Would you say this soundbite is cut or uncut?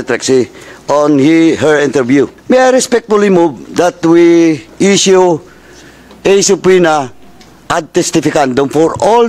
cut